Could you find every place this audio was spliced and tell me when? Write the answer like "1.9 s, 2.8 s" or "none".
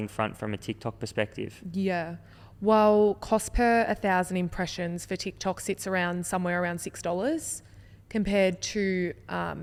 none

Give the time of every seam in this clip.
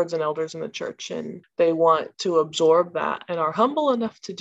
1.4 s, 2.1 s

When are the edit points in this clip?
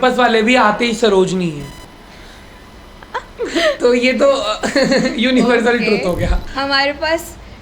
6.4 s

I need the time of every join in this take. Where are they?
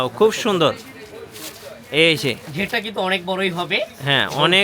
none

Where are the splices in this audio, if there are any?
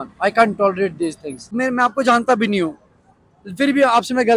1.5 s

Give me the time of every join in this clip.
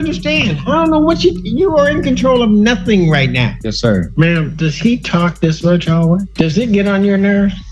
3.9 s, 6.3 s

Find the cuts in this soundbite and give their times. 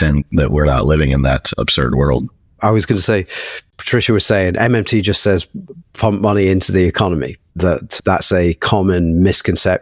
none

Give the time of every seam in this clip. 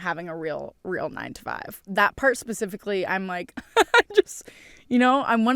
1.9 s

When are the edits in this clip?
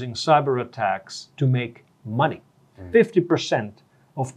2.8 s

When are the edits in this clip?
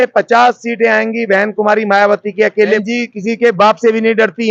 2.8 s

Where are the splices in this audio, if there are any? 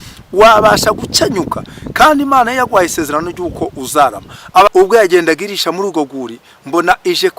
4.7 s

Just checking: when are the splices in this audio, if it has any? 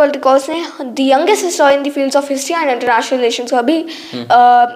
none

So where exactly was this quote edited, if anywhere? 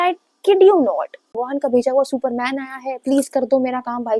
1.4 s

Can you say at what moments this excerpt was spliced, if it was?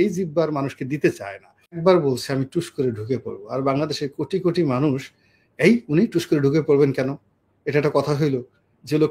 1.8 s

